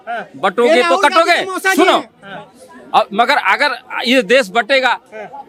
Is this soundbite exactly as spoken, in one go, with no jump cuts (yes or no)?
yes